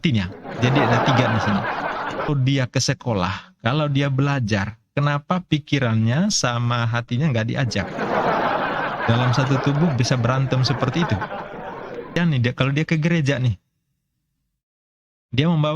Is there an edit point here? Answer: yes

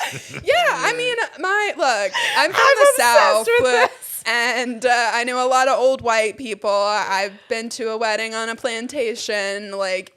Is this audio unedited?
yes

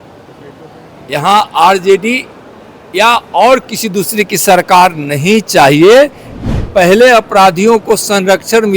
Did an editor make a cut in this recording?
yes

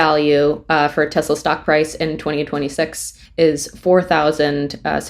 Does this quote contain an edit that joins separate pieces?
no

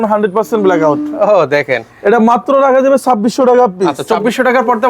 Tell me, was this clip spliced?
yes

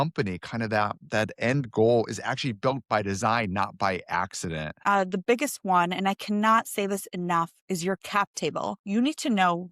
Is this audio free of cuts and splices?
no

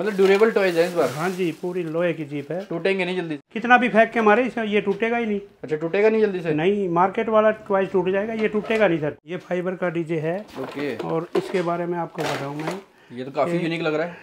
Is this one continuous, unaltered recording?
no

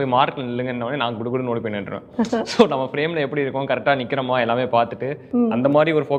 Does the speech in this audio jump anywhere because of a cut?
no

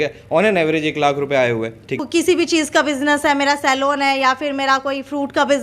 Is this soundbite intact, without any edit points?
no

